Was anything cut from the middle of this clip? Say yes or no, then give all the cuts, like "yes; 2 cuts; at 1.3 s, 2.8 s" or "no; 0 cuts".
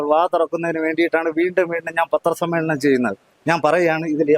yes; 1 cut; at 3.3 s